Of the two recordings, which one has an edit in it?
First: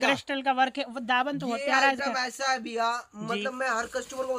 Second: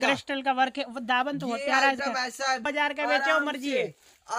second; 1 cut; at 2.7 s

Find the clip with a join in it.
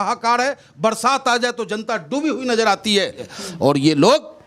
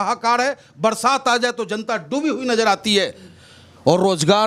first; 1 cut; at 3.4 s

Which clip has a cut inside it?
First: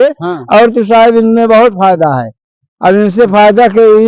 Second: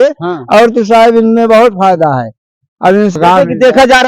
second; 1 cut; at 3.2 s

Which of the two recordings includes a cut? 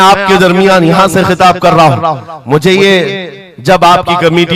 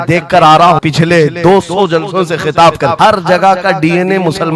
second; 2 cuts; at 0.8 s, 2.9 s

